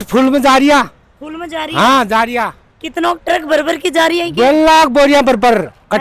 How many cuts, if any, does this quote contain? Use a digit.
0